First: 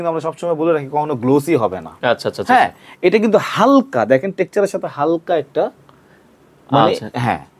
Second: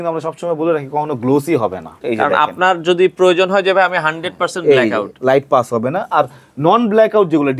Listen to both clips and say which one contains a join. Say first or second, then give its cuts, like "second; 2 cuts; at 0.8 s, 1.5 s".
second; 1 cut; at 2.0 s